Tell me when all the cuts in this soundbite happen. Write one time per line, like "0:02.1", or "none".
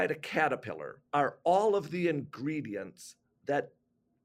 0:00.9

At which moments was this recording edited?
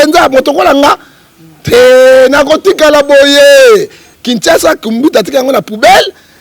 0:04.0

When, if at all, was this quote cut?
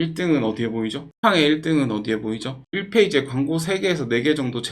0:01.0
0:02.6

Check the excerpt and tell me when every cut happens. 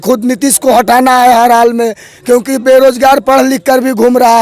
none

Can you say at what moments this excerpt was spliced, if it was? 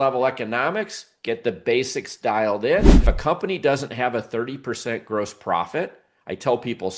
0:03.0

